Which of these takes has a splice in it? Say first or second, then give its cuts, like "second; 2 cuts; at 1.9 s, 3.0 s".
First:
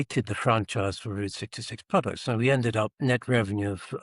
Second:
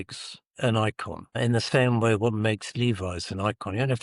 first; 1 cut; at 2.9 s